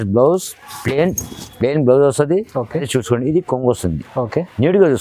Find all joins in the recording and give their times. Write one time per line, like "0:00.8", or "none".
0:02.9